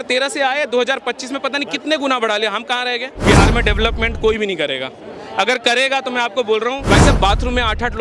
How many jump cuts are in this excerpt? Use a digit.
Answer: 2